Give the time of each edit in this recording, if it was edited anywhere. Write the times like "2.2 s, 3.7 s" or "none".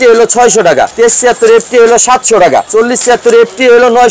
0.9 s, 2.7 s